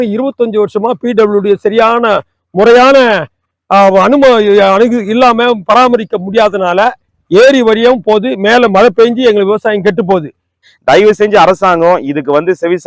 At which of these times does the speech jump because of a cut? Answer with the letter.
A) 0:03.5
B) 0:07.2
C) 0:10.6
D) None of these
C